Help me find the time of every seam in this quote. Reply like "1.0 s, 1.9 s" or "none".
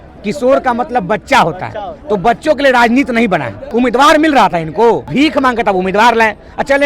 3.6 s, 5.1 s